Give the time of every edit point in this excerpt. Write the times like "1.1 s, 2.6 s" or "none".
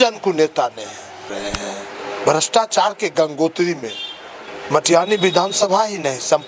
1.3 s